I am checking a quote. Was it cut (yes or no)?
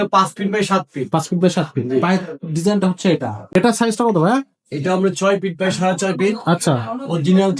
yes